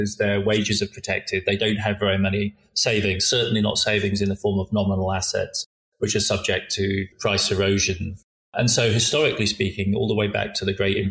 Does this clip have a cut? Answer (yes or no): yes